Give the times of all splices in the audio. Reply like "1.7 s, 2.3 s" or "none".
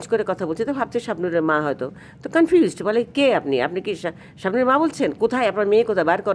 none